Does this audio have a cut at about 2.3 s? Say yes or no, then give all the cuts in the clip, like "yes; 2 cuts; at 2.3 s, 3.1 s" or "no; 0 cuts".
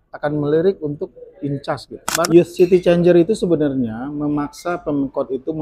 yes; 1 cut; at 2.3 s